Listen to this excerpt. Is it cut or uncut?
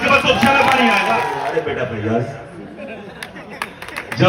cut